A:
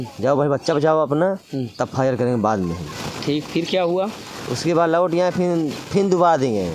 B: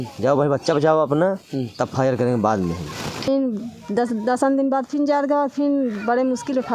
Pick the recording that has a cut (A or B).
B